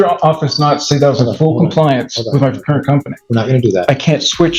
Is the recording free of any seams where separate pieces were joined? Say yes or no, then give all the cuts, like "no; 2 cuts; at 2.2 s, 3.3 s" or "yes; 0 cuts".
yes; 0 cuts